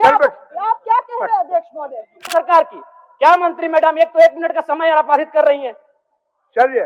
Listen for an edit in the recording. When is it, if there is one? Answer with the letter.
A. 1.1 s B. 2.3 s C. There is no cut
B